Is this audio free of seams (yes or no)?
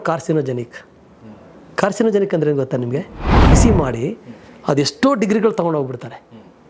no